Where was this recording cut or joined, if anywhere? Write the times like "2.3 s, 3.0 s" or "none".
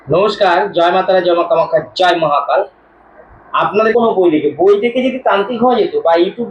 3.9 s